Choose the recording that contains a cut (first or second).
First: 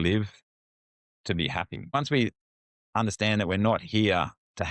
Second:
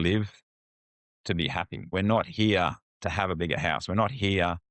second